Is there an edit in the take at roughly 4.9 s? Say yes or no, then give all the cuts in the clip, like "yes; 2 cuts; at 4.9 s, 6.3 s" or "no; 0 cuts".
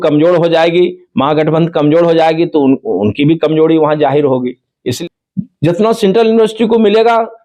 yes; 1 cut; at 4.9 s